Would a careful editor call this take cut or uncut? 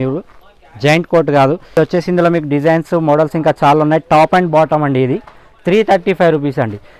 uncut